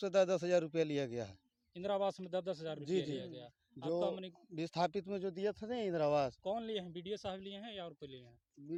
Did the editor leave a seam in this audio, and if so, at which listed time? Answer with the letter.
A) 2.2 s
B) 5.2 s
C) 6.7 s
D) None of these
D